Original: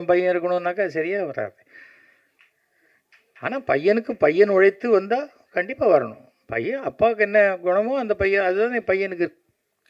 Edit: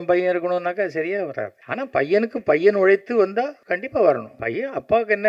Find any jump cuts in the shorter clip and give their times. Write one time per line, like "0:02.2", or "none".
0:01.6
0:03.6
0:04.4